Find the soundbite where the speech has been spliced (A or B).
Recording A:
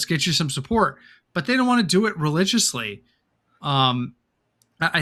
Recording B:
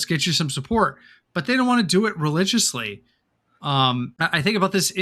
B